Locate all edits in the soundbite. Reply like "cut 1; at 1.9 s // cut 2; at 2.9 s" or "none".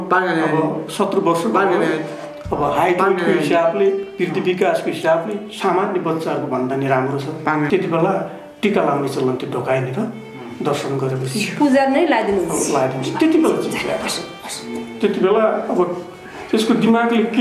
cut 1; at 7.7 s